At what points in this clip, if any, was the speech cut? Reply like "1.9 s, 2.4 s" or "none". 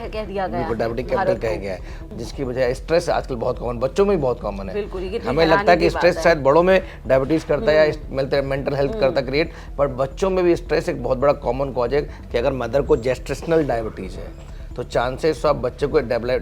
2.0 s, 12.2 s